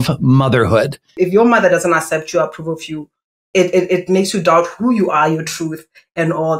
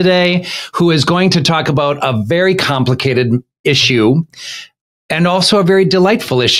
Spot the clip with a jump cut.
first; 1 cut; at 1.1 s

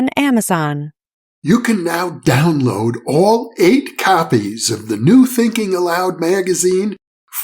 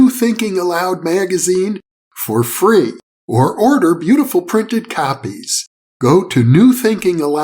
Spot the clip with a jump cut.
first; 1 cut; at 1.3 s

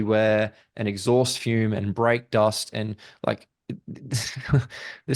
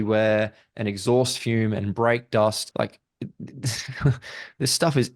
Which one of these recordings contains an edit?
second; 1 cut; at 2.6 s

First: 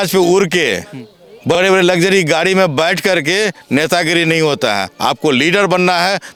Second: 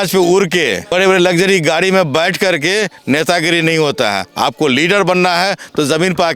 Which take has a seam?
second; 1 cut; at 0.9 s

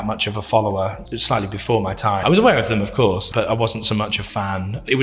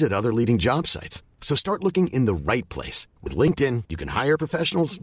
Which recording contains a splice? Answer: first; 3 cuts; at 1.0 s, 2.2 s, 3.2 s

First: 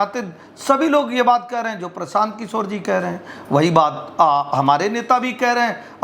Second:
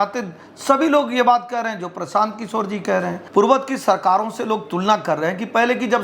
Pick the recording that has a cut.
second; 1 cut; at 3.2 s

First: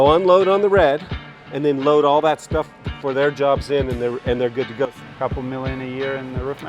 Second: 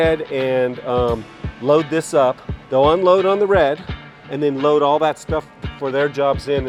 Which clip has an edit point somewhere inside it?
first; 1 cut; at 4.9 s

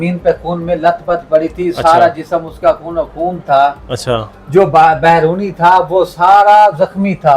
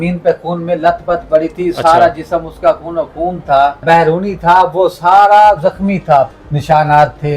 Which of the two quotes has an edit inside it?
second; 2 cuts; at 3.8 s, 6.3 s

